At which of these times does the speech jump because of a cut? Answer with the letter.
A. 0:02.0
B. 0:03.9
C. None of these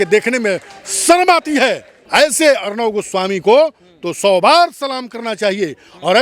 A